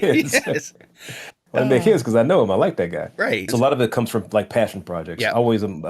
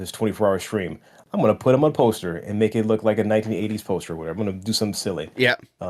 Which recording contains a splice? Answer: first; 1 cut; at 3.4 s

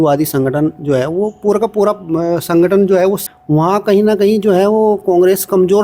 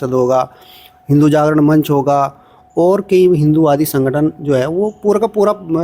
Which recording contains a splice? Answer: first; 1 cut; at 3.2 s

